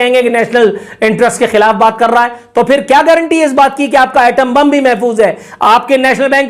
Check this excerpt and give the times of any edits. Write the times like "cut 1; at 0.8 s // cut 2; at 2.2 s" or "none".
none